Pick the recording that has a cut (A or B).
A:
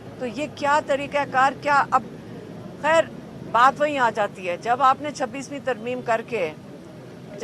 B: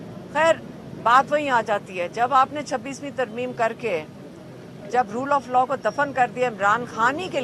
A